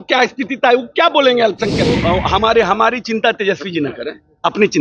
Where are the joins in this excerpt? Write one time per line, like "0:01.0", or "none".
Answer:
0:02.0